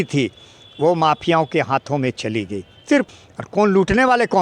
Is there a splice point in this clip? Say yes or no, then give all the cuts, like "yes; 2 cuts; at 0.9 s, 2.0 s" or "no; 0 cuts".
yes; 1 cut; at 3.1 s